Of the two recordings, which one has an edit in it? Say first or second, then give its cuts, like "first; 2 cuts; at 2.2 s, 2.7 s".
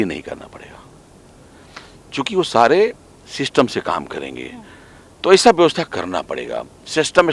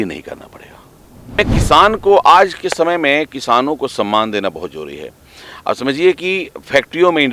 second; 1 cut; at 1.3 s